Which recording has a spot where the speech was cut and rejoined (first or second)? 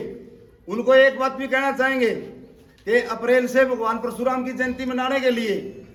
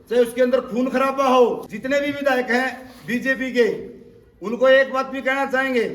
second